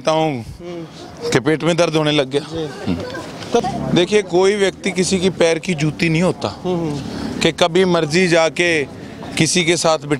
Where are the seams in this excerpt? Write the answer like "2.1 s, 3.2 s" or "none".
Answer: 3.6 s